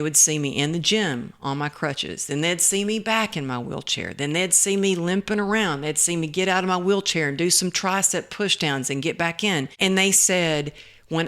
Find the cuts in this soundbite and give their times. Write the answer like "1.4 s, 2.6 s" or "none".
9.7 s